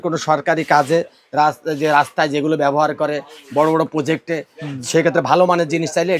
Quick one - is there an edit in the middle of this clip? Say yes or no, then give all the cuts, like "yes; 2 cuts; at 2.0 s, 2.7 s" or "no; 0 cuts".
no; 0 cuts